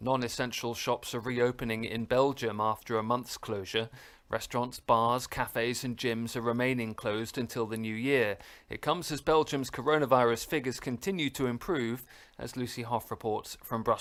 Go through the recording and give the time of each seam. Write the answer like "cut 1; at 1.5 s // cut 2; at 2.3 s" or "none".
none